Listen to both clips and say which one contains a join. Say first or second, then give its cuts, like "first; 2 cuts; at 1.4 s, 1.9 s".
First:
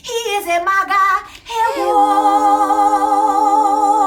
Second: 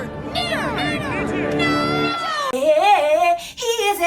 second; 1 cut; at 2.5 s